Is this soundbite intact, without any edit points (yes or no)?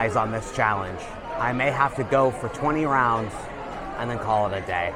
yes